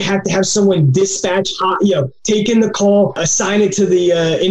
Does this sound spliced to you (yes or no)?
yes